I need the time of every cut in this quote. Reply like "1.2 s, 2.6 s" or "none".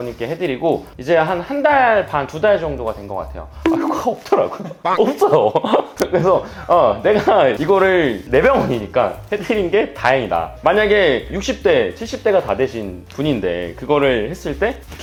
none